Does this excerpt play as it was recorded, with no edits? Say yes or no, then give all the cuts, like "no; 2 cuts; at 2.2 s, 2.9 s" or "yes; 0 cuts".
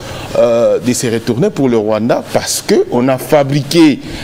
yes; 0 cuts